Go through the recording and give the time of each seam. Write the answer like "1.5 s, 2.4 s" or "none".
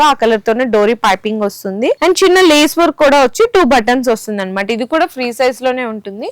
none